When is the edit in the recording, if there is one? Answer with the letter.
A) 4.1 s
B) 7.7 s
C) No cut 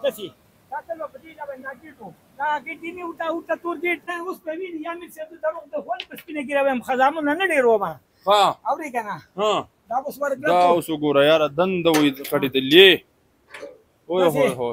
A